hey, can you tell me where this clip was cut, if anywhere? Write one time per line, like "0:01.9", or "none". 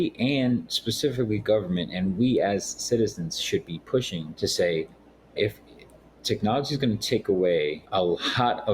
0:04.2
0:07.8